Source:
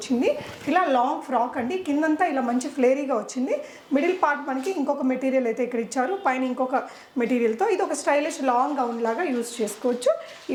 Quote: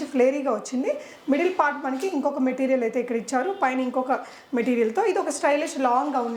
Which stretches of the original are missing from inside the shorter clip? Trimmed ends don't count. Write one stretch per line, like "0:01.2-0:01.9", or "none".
none